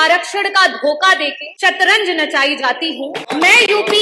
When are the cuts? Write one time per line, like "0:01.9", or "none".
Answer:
0:01.4
0:03.2